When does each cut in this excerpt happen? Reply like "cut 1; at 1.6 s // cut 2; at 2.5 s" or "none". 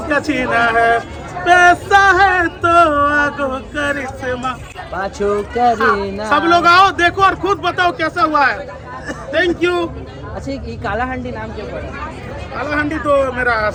none